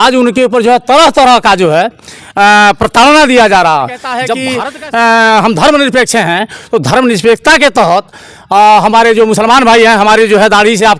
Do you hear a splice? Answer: yes; 1 cut; at 4.4 s

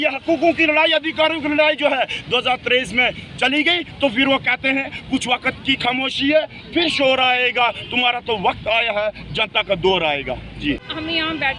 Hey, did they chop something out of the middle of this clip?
no; 0 cuts

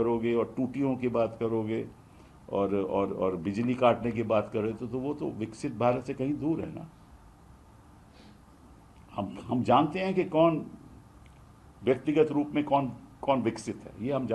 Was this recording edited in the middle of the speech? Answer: no; 0 cuts

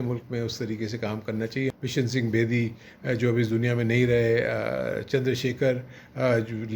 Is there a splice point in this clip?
yes; 1 cut; at 1.7 s

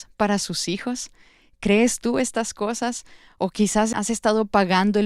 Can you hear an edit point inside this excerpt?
yes; 1 cut; at 3.9 s

